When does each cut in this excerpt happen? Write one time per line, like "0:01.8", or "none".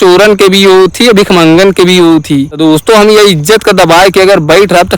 0:02.5